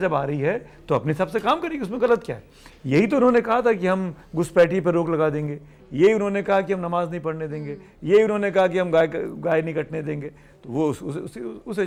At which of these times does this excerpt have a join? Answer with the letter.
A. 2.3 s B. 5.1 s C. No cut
C